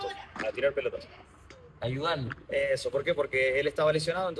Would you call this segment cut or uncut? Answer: uncut